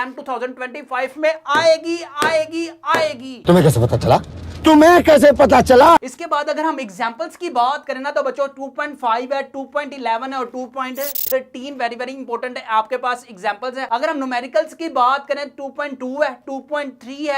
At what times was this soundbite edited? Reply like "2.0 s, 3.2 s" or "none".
none

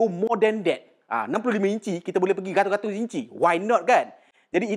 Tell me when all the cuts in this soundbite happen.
none

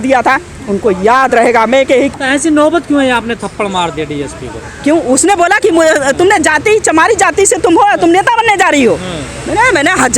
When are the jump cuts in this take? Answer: 2.2 s

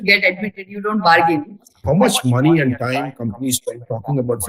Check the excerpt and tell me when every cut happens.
1.7 s

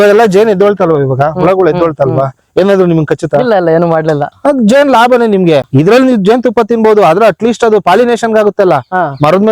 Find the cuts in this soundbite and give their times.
4.3 s, 5.7 s

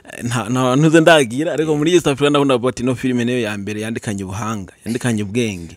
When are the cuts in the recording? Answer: none

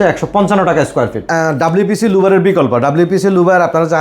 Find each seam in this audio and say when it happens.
1.3 s

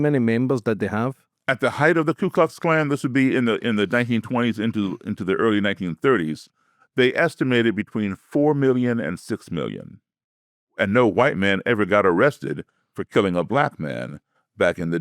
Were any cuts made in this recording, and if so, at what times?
10.8 s

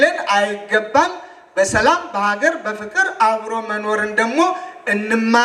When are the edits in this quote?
none

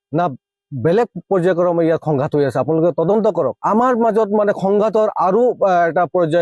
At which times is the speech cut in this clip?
3.6 s

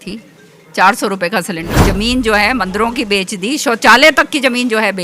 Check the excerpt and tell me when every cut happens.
1.7 s

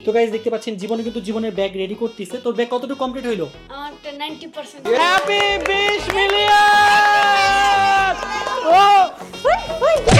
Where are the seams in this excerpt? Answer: 4.8 s

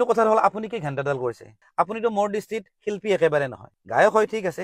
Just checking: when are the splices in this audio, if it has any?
1.6 s

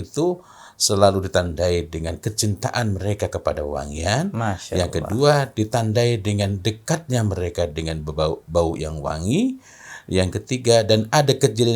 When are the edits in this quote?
none

